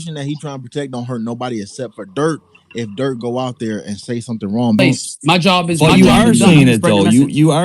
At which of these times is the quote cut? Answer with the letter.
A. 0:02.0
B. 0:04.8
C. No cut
B